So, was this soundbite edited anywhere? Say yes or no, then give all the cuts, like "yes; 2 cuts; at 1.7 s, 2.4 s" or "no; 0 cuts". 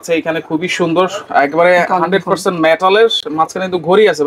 no; 0 cuts